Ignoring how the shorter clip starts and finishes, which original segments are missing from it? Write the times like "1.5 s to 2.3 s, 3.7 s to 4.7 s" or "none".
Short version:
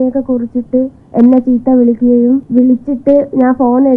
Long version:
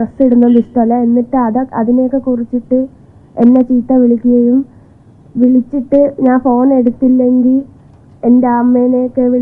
3.0 s to 3.2 s, 4.7 s to 5.3 s